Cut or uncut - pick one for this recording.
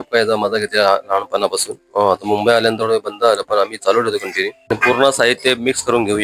cut